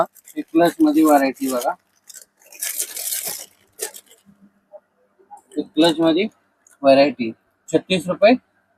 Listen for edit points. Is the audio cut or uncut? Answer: uncut